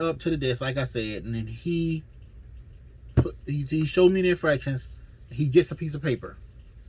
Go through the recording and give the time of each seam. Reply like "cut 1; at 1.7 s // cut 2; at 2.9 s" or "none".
none